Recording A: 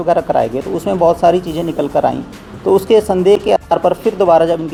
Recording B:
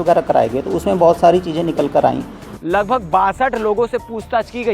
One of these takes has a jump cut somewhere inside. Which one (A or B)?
B